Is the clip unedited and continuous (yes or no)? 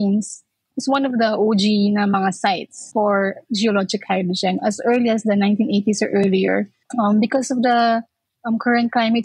no